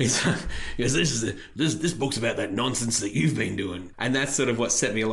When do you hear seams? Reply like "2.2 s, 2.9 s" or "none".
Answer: 3.8 s